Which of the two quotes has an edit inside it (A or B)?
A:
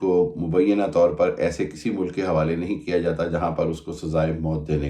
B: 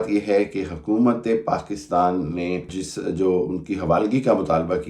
B